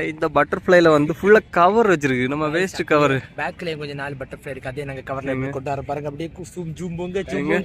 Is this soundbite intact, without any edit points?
yes; 0 cuts

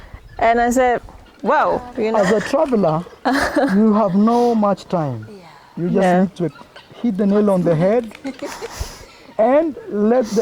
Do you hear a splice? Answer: yes; 1 cut; at 2.1 s

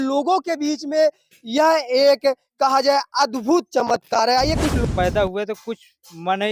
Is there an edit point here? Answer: yes; 1 cut; at 4.8 s

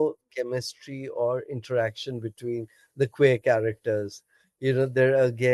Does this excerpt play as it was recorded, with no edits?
yes; 0 cuts

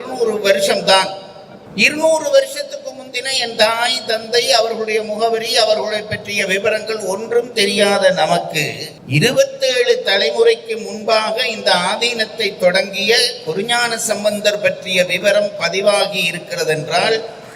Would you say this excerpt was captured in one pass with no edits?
yes; 0 cuts

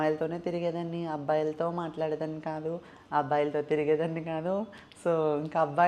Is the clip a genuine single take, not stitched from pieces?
yes; 0 cuts

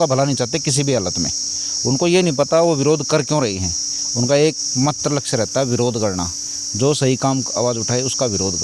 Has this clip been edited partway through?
no; 0 cuts

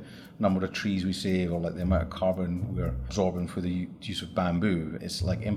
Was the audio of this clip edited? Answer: no; 0 cuts

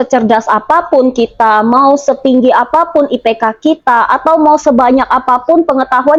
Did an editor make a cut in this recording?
no; 0 cuts

